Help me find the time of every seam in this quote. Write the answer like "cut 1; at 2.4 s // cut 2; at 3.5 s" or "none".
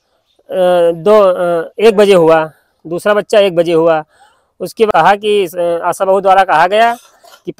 cut 1; at 4.9 s